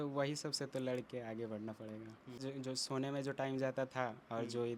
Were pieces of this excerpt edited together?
yes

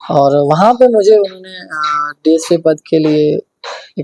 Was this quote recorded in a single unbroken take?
yes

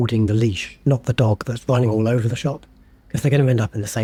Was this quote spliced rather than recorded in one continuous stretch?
no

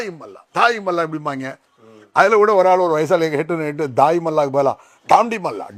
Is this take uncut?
yes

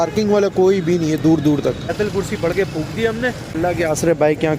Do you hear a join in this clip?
yes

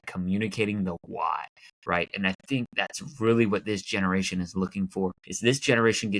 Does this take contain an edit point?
yes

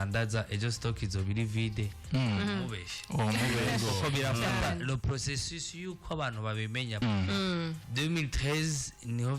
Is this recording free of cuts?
no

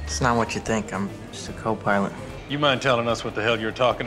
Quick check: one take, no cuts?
no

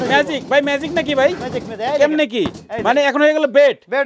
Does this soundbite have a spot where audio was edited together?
no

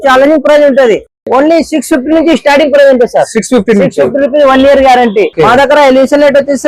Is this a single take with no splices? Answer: no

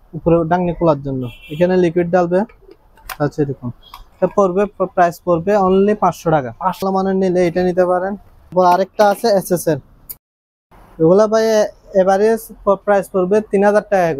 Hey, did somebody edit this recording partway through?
yes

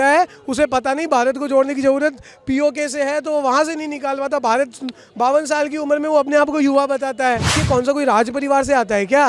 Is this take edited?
yes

